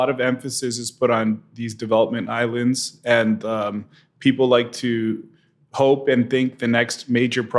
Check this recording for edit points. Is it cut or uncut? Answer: uncut